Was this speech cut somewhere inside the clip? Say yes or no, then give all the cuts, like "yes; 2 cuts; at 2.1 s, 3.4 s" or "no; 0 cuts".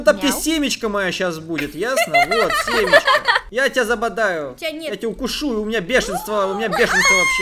yes; 1 cut; at 3.5 s